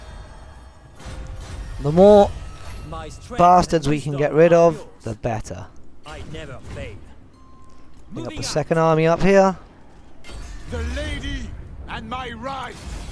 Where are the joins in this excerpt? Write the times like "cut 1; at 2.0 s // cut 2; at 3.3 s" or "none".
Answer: none